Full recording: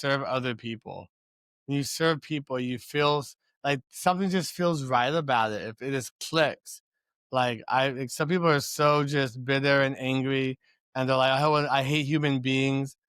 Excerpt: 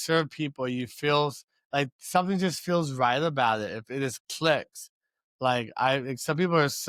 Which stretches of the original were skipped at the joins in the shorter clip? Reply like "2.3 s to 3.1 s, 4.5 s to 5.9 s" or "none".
none